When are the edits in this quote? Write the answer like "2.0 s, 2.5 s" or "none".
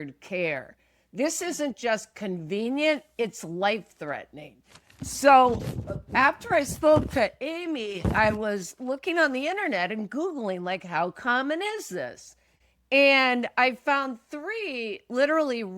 none